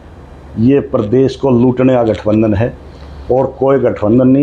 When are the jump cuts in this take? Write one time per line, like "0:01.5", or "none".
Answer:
none